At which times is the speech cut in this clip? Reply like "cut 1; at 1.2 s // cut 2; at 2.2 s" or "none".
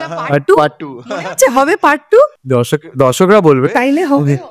none